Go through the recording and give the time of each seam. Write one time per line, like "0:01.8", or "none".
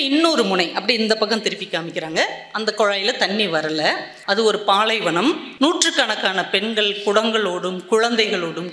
0:04.1
0:05.5